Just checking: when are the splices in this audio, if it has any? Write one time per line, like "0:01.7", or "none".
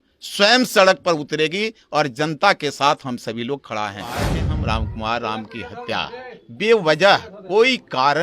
0:04.4

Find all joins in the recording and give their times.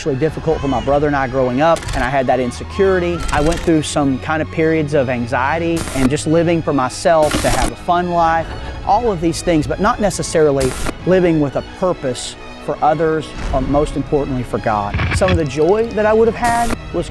0:01.9
0:03.3
0:05.9
0:07.4
0:15.0

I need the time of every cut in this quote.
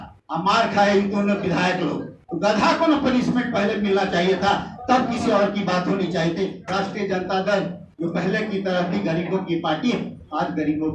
0:06.6

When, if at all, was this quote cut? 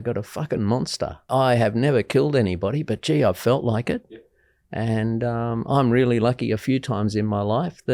0:01.3

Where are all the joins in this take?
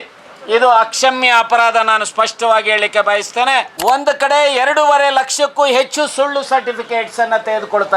0:03.7

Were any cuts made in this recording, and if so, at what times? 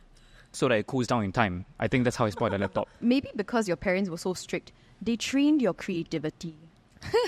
0:03.0

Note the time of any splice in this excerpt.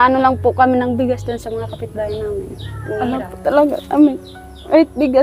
0:03.1

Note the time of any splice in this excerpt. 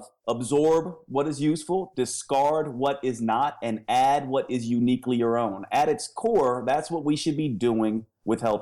none

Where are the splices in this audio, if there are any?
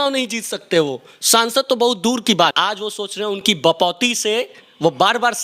0:02.6

